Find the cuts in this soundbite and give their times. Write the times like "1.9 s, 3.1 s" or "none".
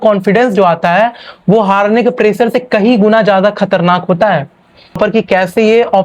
4.9 s